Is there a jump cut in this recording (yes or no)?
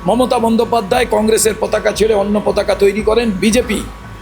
no